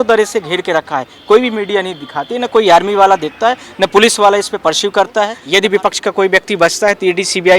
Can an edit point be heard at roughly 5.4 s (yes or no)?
yes